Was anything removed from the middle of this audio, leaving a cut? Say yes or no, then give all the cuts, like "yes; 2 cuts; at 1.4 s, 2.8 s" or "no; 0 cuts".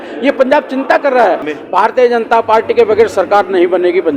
yes; 1 cut; at 1.4 s